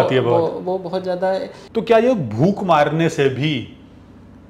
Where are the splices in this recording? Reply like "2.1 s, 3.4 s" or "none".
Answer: 1.6 s